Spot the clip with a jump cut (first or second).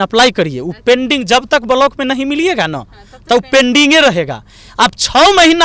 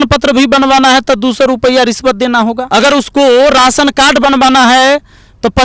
second